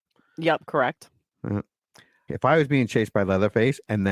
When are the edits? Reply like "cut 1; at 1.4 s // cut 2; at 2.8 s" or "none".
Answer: cut 1; at 2.2 s